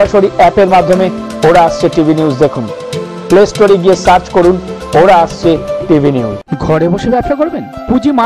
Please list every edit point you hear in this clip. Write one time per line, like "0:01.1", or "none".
0:06.5